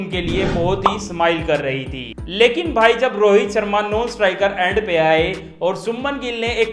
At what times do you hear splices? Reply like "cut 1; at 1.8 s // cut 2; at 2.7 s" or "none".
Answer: none